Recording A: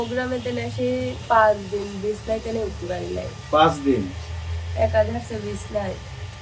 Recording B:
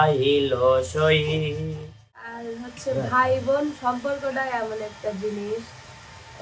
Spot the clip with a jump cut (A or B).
B